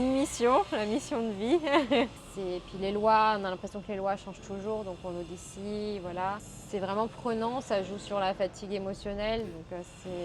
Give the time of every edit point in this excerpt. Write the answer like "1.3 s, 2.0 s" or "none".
2.2 s, 6.5 s